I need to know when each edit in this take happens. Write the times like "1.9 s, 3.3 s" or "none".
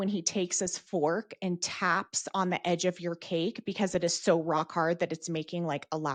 none